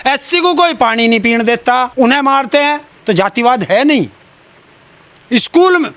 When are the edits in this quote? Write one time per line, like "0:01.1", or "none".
none